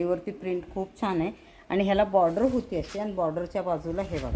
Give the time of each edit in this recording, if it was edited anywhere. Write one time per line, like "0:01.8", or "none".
none